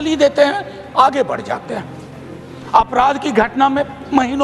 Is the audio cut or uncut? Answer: uncut